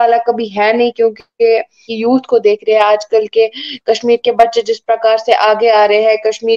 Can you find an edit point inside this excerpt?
yes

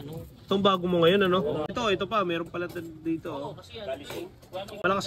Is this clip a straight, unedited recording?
no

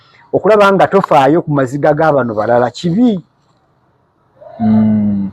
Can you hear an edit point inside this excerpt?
no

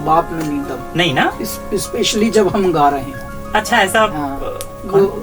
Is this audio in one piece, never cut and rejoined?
no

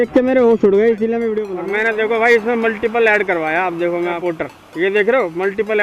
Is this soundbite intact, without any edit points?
no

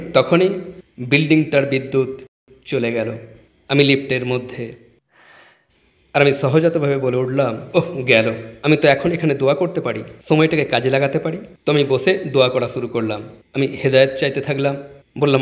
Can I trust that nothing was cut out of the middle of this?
yes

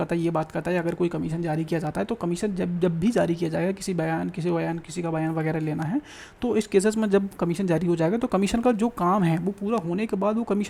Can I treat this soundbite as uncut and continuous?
yes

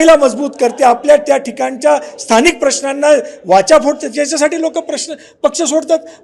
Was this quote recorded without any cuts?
yes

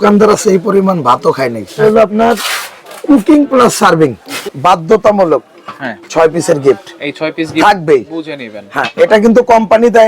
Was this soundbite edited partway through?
yes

